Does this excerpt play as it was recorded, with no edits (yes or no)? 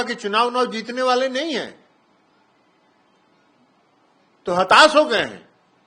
yes